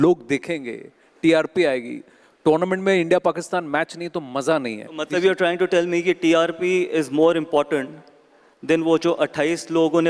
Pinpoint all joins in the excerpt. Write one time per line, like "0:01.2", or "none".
none

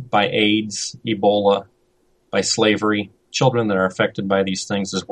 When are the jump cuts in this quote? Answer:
none

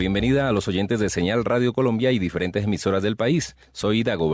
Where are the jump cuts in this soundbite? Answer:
none

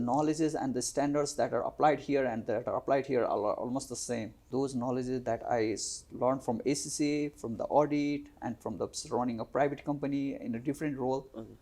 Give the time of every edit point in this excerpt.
0:04.4

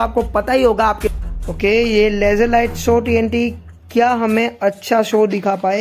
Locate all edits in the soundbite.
0:01.0

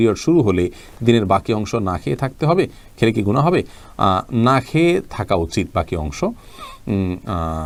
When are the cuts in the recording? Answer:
none

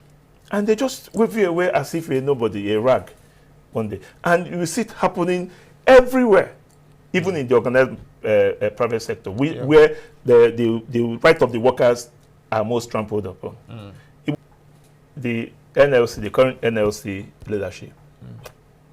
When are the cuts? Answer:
0:14.3

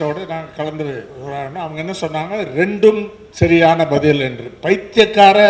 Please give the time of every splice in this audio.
none

